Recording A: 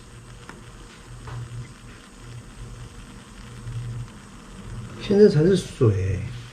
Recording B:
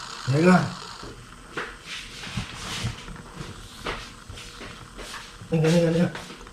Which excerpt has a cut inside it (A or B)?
B